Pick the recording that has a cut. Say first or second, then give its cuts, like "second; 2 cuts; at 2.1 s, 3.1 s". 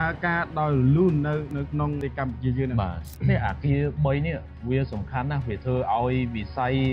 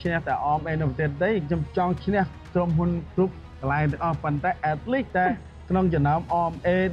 first; 2 cuts; at 2.0 s, 3.0 s